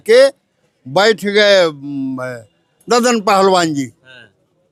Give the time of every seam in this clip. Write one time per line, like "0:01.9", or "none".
none